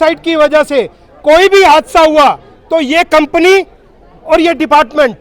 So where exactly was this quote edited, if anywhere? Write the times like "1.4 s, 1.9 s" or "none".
none